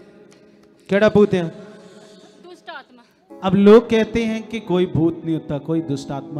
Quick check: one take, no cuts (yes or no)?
no